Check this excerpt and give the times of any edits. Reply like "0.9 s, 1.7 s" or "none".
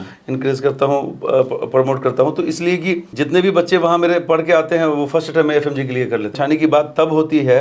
3.1 s, 6.3 s